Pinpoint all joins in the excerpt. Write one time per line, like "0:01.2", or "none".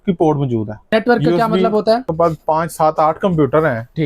0:00.9
0:02.1